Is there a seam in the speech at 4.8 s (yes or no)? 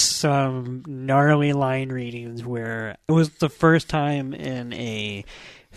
no